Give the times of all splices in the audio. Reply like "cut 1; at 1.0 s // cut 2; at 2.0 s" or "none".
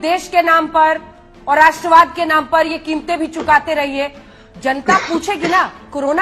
none